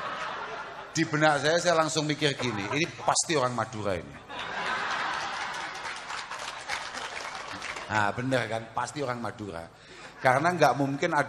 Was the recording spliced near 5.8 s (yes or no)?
no